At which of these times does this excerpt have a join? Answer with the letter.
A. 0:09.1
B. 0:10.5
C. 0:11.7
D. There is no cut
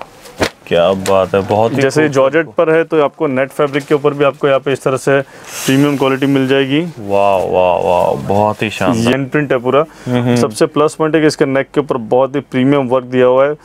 A